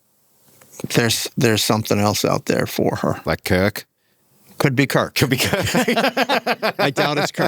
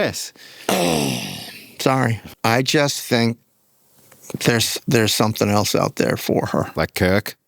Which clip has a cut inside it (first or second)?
second